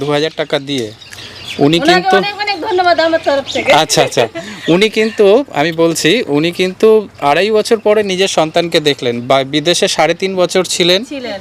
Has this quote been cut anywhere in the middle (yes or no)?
no